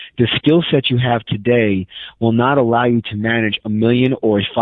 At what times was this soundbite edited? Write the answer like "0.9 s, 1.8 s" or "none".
none